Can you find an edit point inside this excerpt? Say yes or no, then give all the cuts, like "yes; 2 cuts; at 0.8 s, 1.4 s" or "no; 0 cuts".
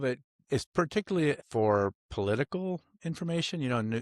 yes; 1 cut; at 1.4 s